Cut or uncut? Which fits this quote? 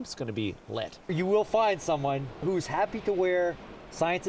cut